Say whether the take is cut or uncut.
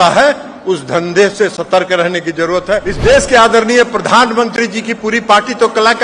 cut